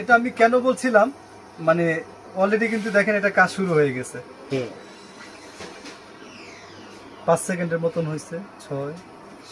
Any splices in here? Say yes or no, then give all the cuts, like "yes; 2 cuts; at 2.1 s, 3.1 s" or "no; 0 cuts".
no; 0 cuts